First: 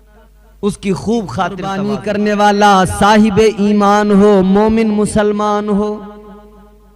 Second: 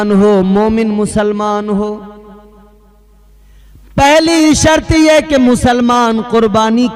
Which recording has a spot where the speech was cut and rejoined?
first; 1 cut; at 2.0 s

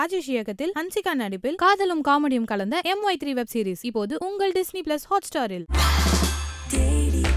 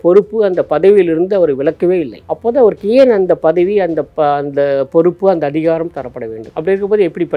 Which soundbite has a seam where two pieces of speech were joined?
second; 1 cut; at 2.2 s

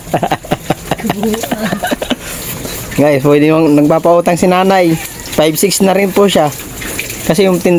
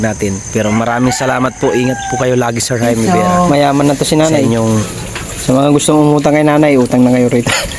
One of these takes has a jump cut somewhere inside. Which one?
second; 2 cuts; at 3.1 s, 3.8 s

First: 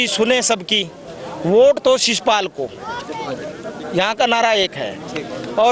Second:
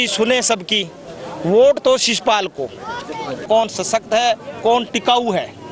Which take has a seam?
second; 1 cut; at 3.4 s

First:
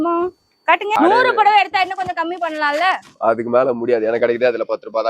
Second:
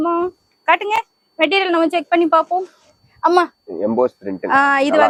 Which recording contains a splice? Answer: first; 1 cut; at 0.9 s

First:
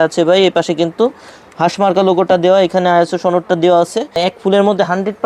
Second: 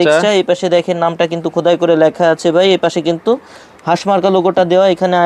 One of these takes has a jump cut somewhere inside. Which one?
first; 1 cut; at 4.1 s

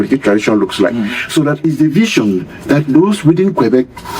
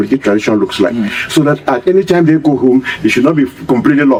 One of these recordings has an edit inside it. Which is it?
first; 1 cut; at 1.6 s

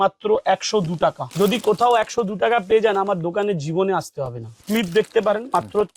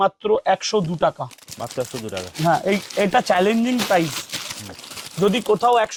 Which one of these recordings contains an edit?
first; 2 cuts; at 1.2 s, 4.6 s

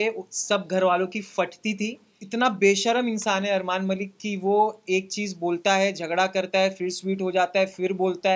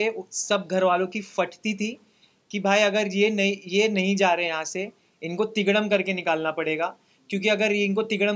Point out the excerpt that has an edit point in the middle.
first; 1 cut; at 2.2 s

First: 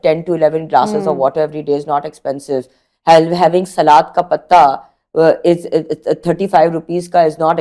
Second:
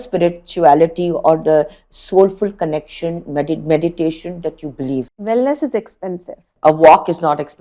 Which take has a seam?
second; 2 cuts; at 5.1 s, 6.5 s

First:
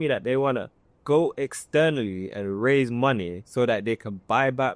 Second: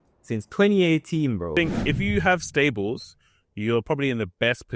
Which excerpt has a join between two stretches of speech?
second; 1 cut; at 1.5 s

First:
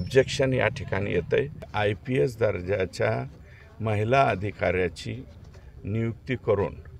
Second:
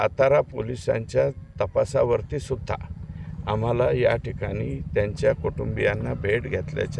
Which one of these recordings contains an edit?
first; 1 cut; at 1.7 s

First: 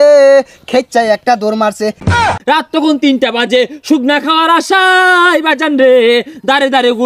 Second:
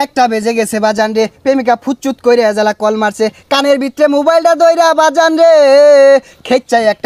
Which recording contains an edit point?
first; 1 cut; at 2.2 s

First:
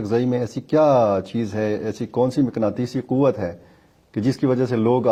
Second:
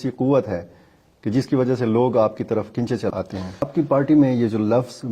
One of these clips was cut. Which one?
second; 1 cut; at 3.6 s

